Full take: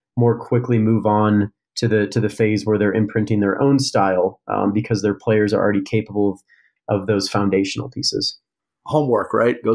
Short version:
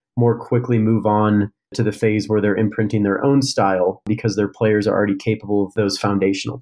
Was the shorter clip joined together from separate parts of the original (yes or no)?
yes